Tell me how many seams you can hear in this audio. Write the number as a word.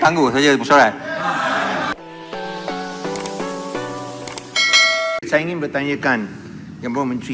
one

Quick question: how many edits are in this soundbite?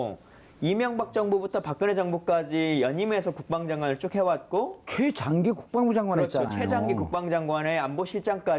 one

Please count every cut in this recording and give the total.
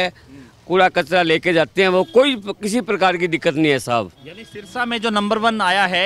zero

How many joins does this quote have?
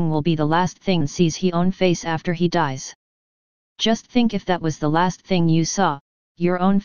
zero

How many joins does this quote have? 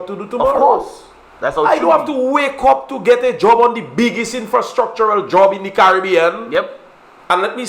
zero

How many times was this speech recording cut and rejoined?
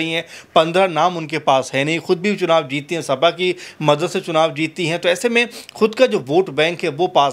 zero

